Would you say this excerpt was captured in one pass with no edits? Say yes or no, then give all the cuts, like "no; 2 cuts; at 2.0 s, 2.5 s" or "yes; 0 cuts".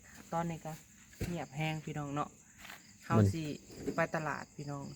yes; 0 cuts